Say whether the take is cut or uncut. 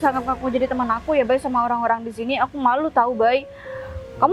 uncut